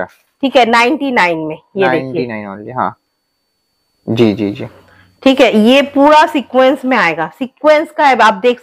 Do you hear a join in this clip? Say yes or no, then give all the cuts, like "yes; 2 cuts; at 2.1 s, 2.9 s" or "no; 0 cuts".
no; 0 cuts